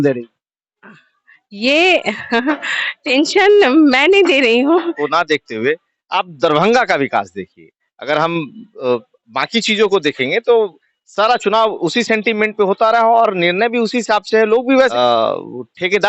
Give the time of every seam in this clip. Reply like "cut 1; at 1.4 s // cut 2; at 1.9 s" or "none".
cut 1; at 5.0 s // cut 2; at 14.9 s